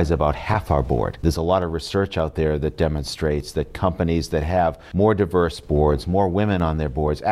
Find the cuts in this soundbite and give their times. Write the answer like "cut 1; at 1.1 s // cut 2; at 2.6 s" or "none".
cut 1; at 1.2 s // cut 2; at 4.8 s